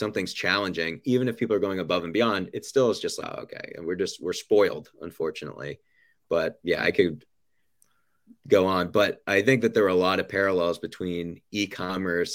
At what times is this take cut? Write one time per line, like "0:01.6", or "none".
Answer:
0:03.3
0:06.6

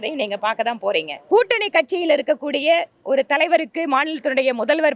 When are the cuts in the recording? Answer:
0:01.1

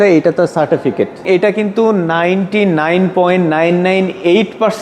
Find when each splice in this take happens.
0:01.2

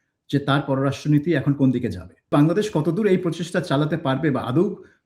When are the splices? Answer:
0:02.3

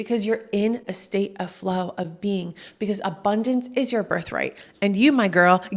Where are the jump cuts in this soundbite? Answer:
none

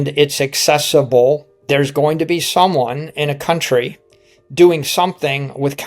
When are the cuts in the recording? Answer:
0:01.5

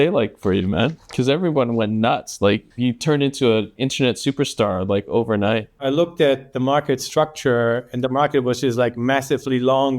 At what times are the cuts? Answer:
0:01.0
0:02.7
0:05.7

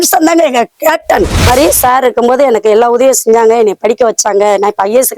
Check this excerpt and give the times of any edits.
0:01.5

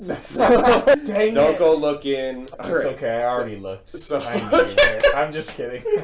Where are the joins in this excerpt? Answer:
0:01.0
0:02.4

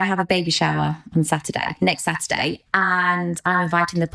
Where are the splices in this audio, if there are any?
0:01.7

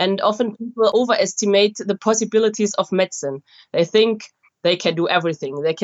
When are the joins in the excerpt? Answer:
0:00.9
0:02.0

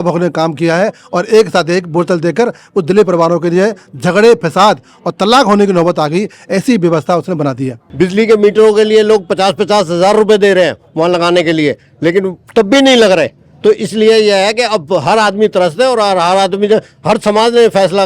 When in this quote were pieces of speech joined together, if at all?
0:07.8

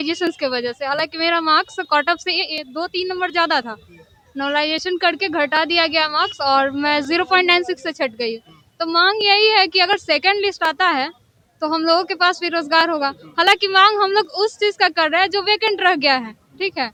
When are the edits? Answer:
none

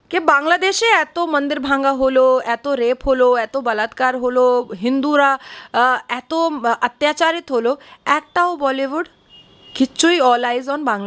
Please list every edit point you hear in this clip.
none

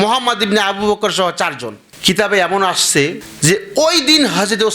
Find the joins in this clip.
0:03.3

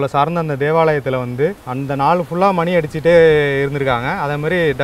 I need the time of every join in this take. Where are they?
0:01.6

